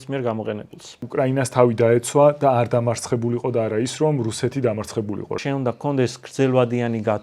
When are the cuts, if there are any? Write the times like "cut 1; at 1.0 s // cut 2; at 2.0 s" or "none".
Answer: cut 1; at 1.0 s // cut 2; at 5.4 s